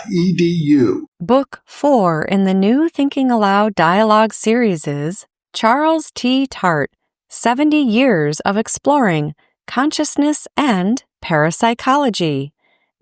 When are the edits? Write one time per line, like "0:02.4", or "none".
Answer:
0:01.1

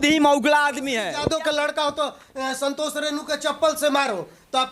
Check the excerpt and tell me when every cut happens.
0:01.0

